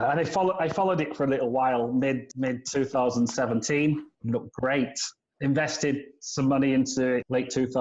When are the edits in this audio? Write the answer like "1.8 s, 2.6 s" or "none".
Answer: 2.2 s

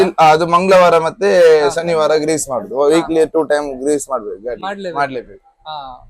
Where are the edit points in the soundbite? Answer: none

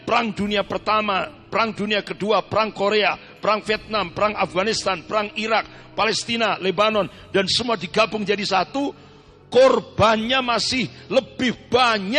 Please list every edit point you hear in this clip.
none

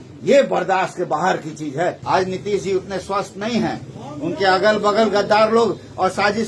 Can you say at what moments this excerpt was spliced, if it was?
2.0 s

